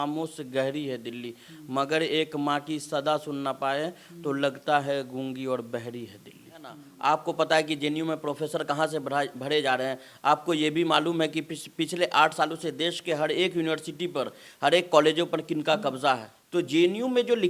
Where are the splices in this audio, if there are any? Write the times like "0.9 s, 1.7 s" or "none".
6.8 s, 16.3 s